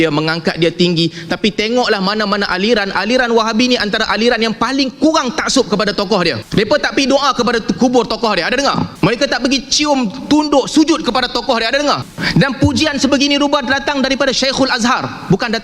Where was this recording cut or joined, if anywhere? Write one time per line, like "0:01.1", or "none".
0:06.4
0:08.9
0:12.1